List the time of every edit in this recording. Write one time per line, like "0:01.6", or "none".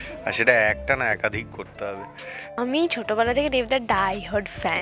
0:02.6